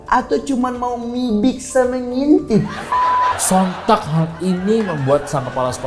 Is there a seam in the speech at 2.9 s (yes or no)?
yes